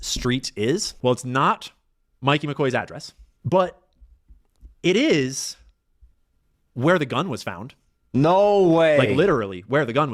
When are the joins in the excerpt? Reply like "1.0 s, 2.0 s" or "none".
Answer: none